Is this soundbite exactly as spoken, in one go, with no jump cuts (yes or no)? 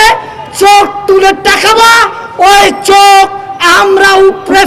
yes